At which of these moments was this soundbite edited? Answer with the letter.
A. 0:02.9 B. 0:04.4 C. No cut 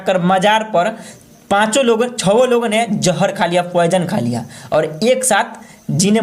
C